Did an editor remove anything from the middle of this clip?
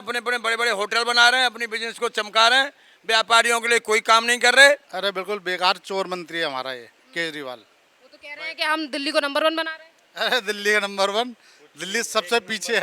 yes; 1 cut; at 4.9 s

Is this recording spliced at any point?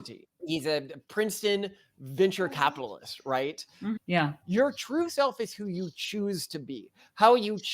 yes; 1 cut; at 4.0 s

